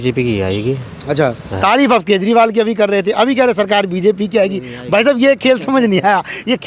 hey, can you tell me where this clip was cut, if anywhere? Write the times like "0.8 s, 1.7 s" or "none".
none